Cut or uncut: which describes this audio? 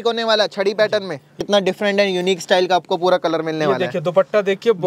cut